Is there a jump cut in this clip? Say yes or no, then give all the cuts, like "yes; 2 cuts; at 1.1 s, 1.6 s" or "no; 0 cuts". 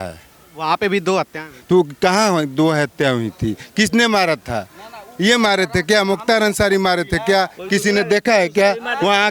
no; 0 cuts